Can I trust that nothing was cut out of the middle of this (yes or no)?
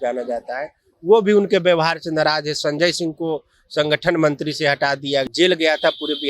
no